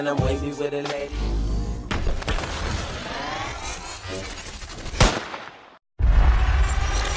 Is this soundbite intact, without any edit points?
no; 1 cut; at 5.8 s

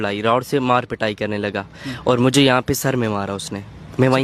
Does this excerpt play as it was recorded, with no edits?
yes; 0 cuts

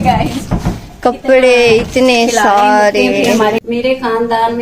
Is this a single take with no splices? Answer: no; 1 cut; at 3.6 s

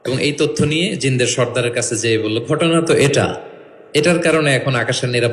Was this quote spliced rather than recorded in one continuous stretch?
no; 0 cuts

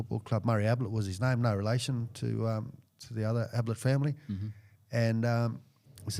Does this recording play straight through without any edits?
yes; 0 cuts

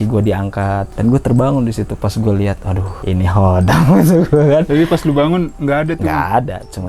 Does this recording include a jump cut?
yes; 3 cuts; at 0.9 s, 2.9 s, 5.5 s

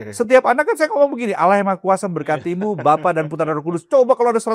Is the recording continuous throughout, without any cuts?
yes; 0 cuts

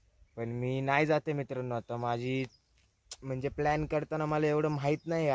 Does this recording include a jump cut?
no; 0 cuts

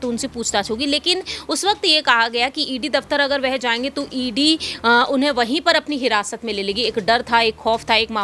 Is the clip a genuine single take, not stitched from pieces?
yes; 0 cuts

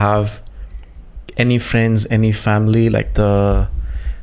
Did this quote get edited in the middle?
yes; 1 cut; at 3.1 s

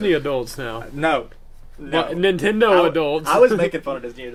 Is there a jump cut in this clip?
no; 0 cuts

